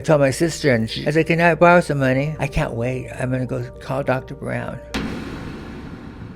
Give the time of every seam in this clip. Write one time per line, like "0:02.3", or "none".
0:01.0
0:02.4
0:03.7
0:04.8